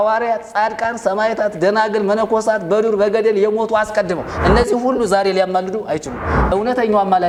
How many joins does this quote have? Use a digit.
0